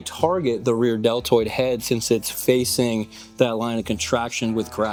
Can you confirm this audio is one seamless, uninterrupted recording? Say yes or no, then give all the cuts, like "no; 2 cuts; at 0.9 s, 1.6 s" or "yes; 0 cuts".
yes; 0 cuts